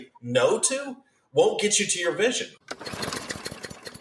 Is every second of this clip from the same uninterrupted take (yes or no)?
no